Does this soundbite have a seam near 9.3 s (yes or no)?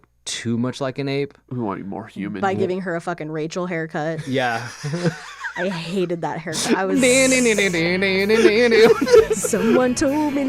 yes